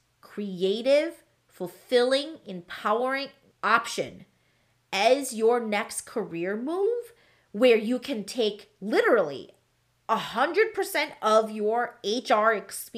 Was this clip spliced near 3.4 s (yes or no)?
yes